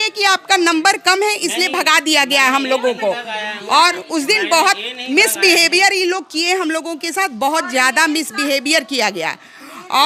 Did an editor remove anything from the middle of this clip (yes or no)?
no